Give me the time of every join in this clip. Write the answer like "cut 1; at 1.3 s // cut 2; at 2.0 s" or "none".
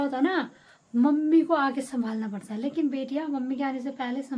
none

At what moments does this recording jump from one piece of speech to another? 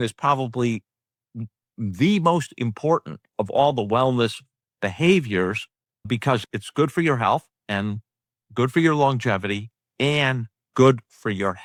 none

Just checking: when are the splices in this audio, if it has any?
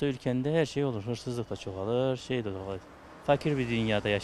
none

